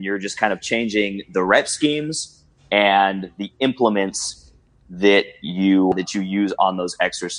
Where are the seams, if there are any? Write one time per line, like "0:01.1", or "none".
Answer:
0:05.9